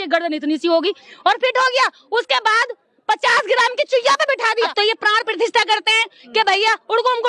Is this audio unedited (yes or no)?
no